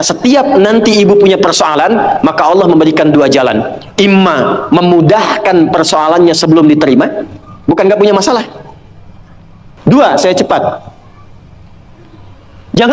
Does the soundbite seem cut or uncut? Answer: cut